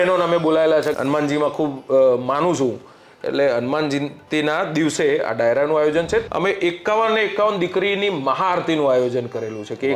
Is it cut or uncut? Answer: cut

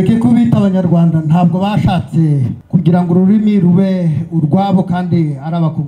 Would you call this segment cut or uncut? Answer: cut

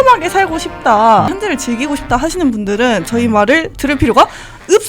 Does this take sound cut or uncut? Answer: cut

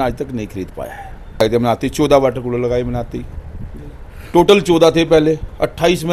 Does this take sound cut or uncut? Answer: cut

